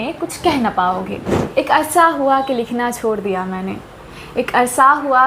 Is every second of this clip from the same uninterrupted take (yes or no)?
no